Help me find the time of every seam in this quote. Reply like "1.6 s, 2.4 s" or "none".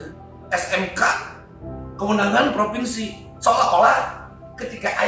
none